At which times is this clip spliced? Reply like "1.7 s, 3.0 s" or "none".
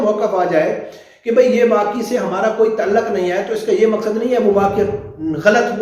none